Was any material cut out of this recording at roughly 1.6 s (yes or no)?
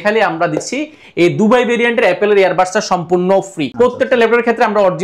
no